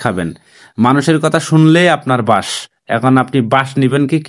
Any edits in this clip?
no; 0 cuts

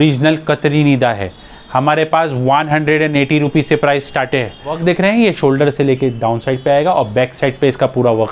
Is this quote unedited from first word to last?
no; 1 cut; at 4.8 s

